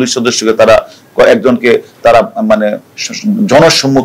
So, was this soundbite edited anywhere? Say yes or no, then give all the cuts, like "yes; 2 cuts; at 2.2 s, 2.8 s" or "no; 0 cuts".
no; 0 cuts